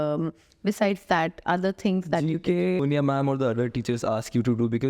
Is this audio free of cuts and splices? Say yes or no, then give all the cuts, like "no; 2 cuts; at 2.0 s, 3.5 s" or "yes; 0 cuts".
no; 1 cut; at 2.8 s